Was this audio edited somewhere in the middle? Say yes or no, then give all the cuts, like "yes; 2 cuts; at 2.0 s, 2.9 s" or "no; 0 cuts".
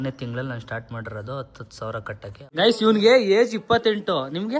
yes; 1 cut; at 2.6 s